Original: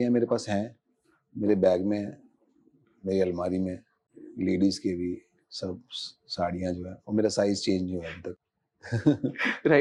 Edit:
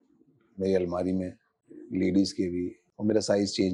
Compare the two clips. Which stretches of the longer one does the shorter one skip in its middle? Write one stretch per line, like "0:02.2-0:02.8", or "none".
0:05.3-0:06.9